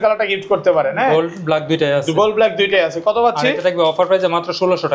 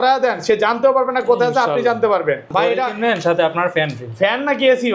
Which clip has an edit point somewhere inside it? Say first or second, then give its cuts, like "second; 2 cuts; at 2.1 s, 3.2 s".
second; 1 cut; at 2.5 s